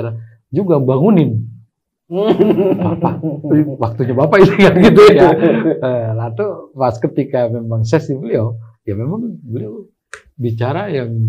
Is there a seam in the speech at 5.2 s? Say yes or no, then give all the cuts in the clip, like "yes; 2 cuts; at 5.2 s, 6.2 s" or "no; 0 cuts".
no; 0 cuts